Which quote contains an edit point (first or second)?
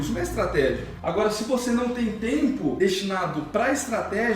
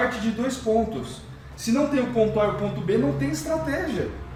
first